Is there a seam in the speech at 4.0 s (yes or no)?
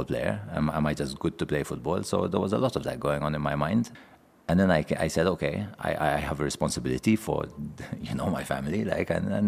yes